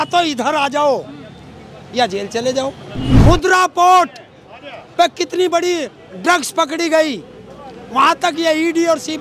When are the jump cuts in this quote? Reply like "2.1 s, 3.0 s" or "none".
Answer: 3.3 s